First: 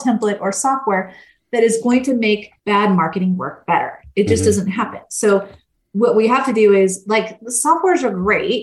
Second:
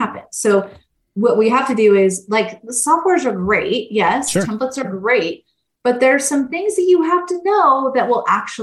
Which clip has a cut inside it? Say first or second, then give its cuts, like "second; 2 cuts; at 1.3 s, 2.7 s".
first; 1 cut; at 2.5 s